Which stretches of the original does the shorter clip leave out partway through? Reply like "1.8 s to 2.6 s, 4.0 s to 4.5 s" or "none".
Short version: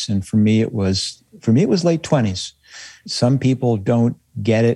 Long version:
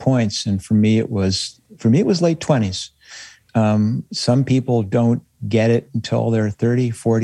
3.4 s to 4.1 s